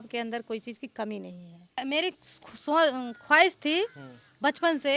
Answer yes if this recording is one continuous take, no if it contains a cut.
no